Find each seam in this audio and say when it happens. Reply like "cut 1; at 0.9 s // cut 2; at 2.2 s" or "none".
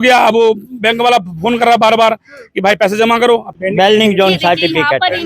cut 1; at 3.5 s